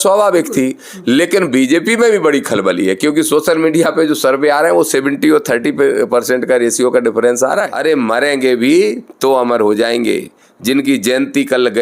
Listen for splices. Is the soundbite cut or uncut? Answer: cut